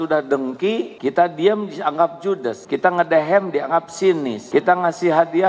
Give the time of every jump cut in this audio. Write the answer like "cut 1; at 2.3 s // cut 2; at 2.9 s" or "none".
cut 1; at 0.9 s // cut 2; at 2.6 s // cut 3; at 4.4 s